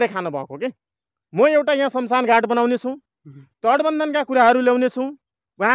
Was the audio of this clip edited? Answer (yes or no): no